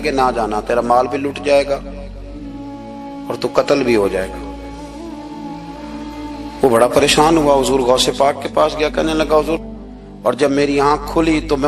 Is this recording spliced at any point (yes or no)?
yes